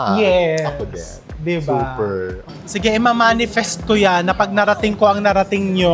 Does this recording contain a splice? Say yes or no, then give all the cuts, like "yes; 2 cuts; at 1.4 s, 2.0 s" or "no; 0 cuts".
yes; 1 cut; at 2.4 s